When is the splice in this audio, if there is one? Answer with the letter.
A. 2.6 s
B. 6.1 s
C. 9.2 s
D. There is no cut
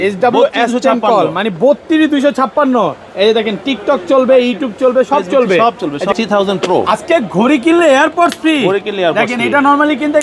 B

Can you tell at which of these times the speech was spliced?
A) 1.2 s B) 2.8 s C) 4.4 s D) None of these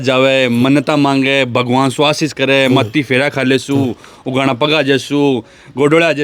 D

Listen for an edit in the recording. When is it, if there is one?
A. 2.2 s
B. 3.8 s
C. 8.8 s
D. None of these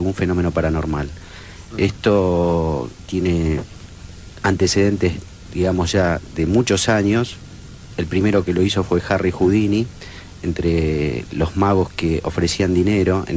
A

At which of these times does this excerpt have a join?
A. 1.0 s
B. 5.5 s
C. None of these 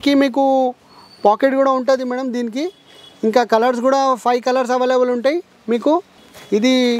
C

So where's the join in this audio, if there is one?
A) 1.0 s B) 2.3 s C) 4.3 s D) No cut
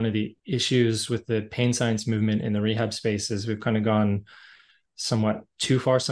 D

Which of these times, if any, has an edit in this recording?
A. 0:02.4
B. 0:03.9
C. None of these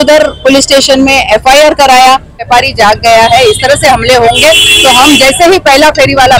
A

